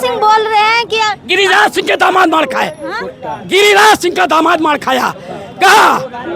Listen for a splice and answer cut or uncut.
uncut